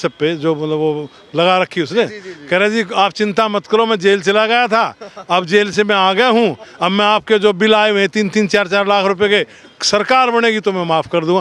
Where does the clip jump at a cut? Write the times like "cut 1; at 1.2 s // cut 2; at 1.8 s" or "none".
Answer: none